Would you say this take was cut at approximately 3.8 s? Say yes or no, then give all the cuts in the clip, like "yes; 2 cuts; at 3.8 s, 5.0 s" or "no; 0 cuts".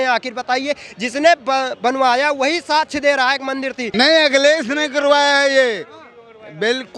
yes; 1 cut; at 3.8 s